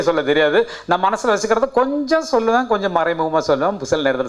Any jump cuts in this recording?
no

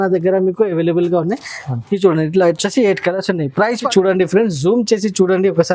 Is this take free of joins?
no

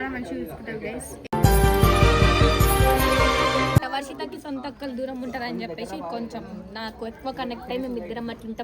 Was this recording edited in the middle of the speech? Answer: yes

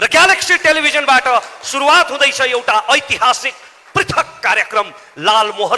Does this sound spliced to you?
no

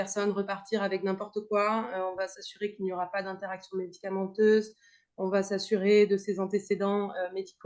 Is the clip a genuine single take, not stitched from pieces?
yes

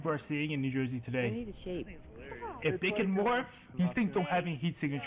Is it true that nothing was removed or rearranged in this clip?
yes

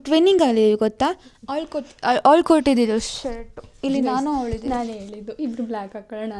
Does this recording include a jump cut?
no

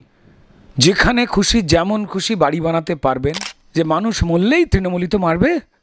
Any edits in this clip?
yes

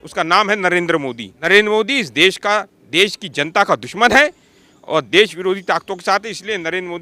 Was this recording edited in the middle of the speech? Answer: yes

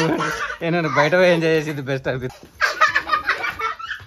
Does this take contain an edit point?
yes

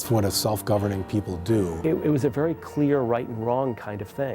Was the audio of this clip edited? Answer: yes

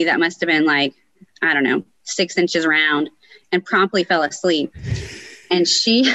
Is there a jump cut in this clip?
no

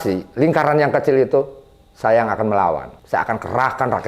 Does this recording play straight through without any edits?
no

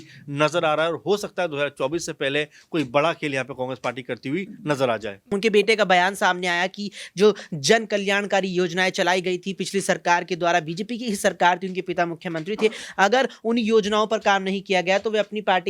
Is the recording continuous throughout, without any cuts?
no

